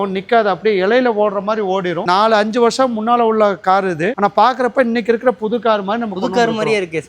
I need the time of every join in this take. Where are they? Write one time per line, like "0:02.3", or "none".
0:02.0